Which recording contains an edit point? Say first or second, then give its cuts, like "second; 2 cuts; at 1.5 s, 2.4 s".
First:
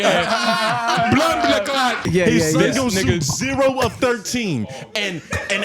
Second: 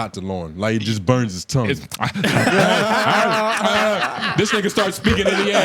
first; 1 cut; at 2.0 s